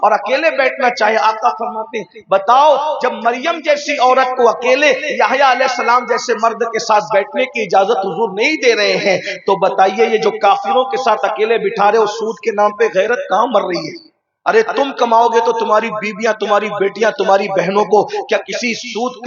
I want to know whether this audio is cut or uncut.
uncut